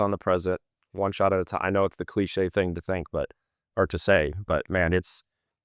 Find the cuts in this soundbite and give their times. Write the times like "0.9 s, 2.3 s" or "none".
none